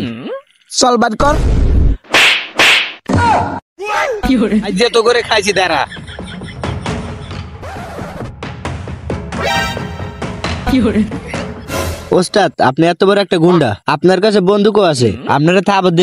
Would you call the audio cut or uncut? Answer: uncut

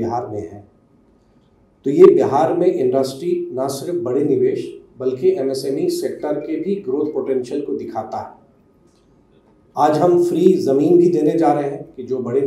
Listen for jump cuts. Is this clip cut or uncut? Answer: uncut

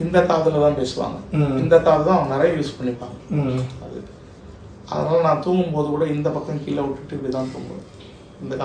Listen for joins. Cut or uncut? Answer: uncut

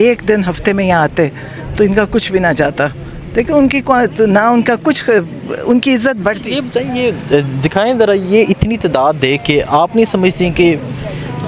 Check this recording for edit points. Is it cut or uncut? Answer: uncut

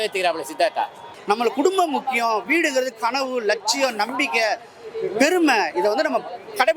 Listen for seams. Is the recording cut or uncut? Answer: cut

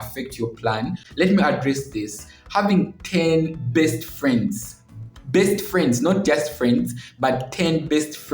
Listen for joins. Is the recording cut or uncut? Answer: cut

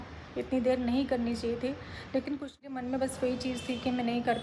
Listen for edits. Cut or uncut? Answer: cut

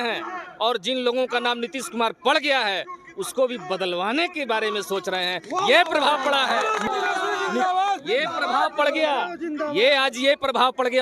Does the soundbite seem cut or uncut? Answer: cut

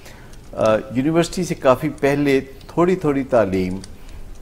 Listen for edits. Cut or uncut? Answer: uncut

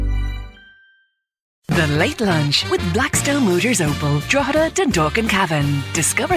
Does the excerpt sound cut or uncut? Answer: cut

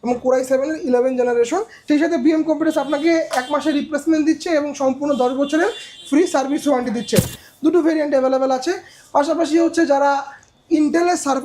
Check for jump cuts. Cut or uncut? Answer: cut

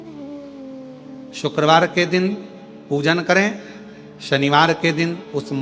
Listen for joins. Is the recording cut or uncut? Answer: cut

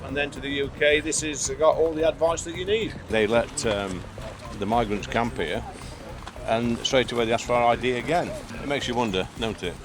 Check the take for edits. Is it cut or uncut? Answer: cut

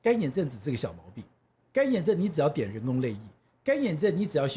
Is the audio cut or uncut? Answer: uncut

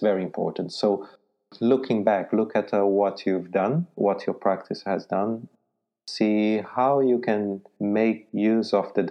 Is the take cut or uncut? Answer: cut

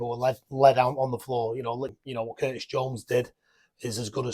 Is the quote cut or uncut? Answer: cut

